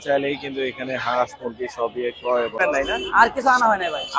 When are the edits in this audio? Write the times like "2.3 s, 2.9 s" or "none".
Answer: 2.6 s